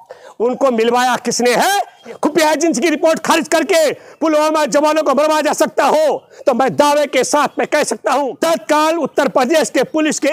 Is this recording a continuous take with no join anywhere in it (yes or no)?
no